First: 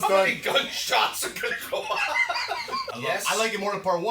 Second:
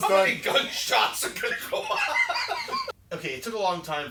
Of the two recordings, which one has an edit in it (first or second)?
first